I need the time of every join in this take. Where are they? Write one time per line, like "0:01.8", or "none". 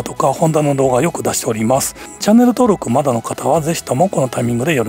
0:02.1